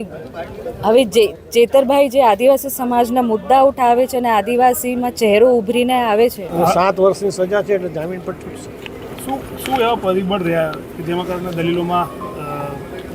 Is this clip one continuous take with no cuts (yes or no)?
no